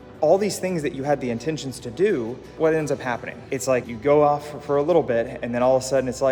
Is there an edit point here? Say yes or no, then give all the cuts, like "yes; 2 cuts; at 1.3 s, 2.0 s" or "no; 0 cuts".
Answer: no; 0 cuts